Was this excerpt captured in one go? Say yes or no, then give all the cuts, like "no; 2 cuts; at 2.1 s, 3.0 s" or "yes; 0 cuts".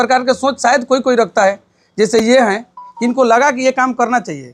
yes; 0 cuts